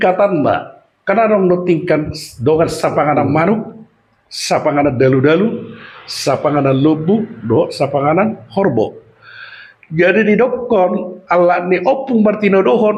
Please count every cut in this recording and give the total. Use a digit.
0